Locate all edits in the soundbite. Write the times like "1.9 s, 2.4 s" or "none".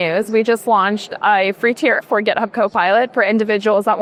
none